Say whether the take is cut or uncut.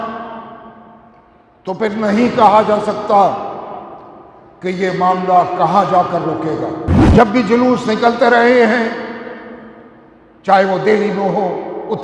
cut